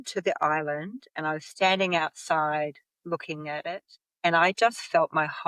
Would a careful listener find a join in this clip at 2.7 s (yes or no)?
no